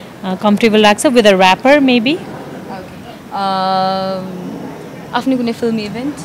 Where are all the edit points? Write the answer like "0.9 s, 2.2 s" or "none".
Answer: none